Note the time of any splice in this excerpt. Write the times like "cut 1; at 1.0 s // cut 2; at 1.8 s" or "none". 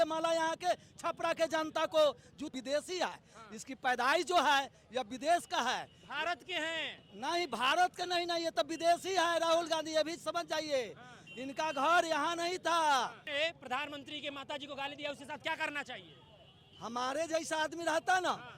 cut 1; at 2.5 s // cut 2; at 13.2 s